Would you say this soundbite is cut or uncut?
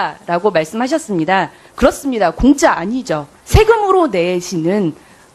cut